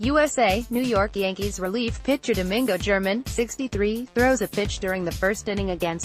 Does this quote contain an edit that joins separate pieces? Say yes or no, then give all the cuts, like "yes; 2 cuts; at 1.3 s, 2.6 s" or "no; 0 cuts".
no; 0 cuts